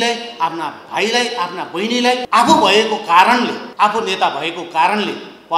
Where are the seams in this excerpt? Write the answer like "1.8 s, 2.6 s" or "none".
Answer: 2.2 s, 3.6 s